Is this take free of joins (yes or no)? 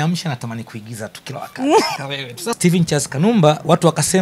no